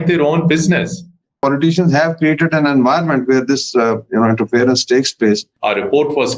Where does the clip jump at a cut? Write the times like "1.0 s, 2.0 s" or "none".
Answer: 1.4 s, 5.5 s